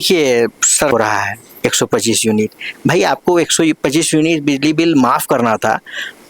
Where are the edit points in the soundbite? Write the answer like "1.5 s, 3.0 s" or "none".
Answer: 0.9 s

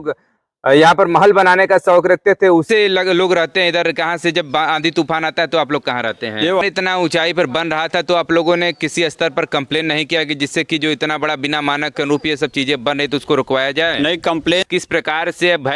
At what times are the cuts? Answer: 2.7 s, 6.5 s, 14.6 s

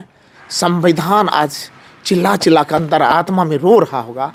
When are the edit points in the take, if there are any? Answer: none

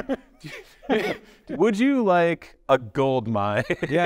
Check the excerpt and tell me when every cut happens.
1.3 s

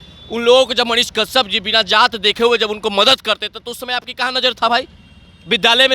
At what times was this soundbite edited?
none

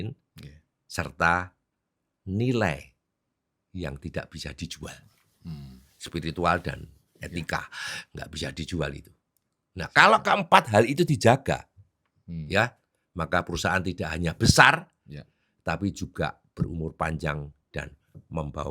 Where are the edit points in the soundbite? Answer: none

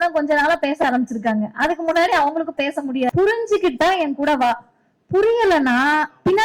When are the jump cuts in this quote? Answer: 3.1 s

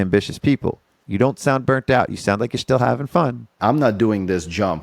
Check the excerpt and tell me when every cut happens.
0.9 s, 3.5 s

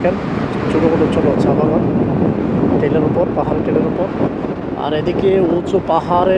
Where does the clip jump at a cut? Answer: none

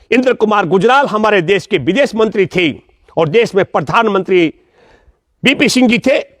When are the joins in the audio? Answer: none

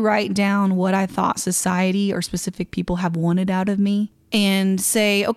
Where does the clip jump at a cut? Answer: 4.2 s

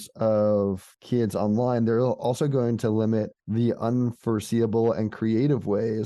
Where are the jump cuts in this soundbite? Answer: 0.9 s, 3.4 s

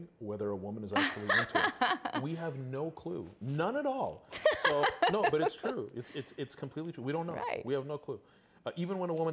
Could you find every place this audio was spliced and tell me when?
none

